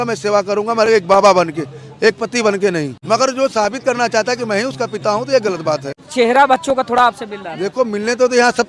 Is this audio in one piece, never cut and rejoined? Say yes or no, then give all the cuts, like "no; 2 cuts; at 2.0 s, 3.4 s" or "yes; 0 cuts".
no; 2 cuts; at 2.4 s, 6.0 s